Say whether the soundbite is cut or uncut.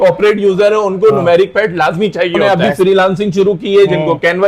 cut